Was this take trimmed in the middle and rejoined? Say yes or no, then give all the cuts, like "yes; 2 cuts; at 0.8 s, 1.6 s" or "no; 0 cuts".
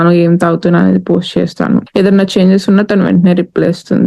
yes; 1 cut; at 1.9 s